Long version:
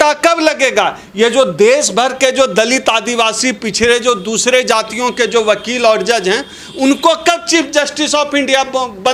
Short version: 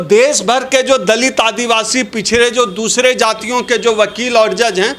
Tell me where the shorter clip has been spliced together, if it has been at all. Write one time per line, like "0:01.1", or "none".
none